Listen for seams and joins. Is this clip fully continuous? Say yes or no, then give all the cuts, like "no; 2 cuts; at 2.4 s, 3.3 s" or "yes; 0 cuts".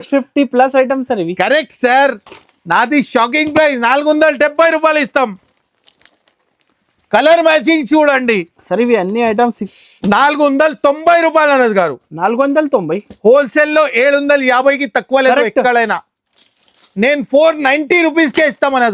no; 1 cut; at 9.6 s